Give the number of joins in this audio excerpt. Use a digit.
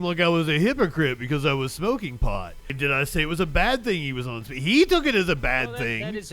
1